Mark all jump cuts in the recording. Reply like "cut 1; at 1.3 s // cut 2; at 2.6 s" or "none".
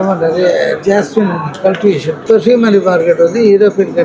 cut 1; at 2.1 s